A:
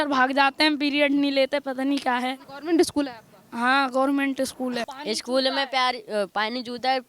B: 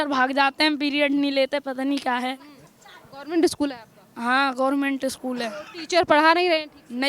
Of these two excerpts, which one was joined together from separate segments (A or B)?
A